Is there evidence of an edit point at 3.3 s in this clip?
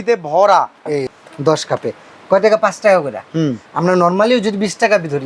no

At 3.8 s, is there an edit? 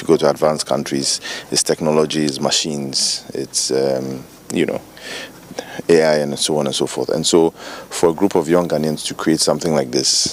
no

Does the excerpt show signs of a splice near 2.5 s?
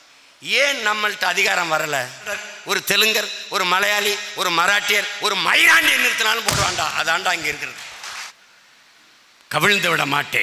yes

